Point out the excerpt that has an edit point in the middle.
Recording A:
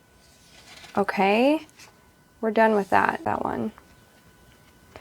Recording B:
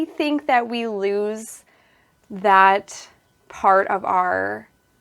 A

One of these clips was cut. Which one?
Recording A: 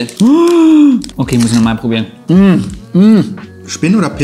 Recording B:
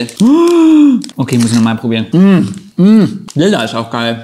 B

